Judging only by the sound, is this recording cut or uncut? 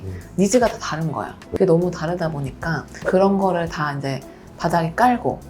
cut